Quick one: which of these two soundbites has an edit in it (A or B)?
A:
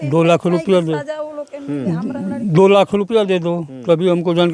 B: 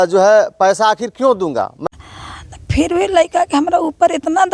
B